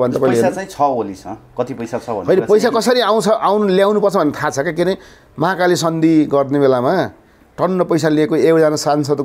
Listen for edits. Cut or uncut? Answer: uncut